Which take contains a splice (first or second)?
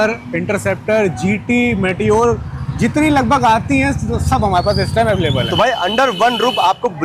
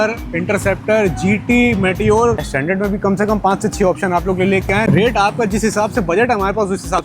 second